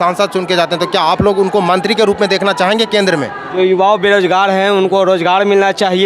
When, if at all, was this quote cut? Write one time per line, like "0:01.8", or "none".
0:03.4